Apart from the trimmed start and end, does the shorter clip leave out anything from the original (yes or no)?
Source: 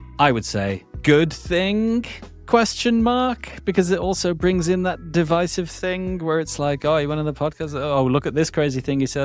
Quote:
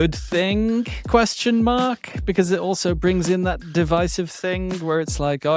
yes